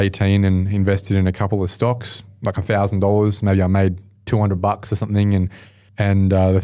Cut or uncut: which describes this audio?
uncut